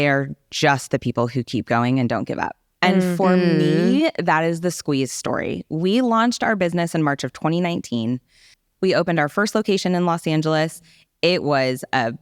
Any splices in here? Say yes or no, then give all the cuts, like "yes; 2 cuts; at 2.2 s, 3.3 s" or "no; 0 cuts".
no; 0 cuts